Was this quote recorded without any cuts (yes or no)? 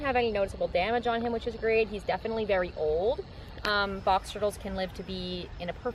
yes